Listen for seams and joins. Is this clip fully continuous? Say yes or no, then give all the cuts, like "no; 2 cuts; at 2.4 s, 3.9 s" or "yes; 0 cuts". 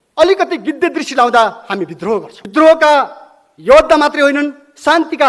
no; 1 cut; at 2.4 s